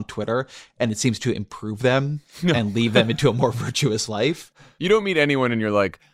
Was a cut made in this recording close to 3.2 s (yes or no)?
no